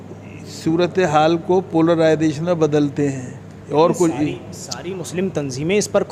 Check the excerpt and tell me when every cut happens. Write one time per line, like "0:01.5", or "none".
none